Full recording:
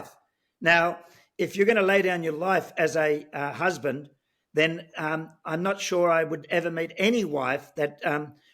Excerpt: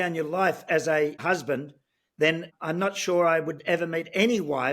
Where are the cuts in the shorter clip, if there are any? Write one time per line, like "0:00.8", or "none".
0:01.2
0:02.5